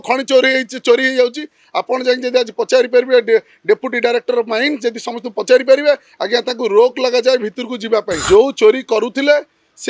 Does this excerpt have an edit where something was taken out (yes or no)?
yes